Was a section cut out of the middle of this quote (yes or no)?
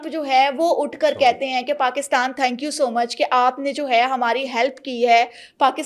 no